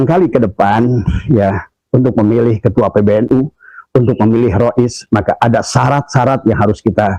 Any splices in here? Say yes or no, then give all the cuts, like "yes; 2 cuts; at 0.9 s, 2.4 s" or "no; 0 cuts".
no; 0 cuts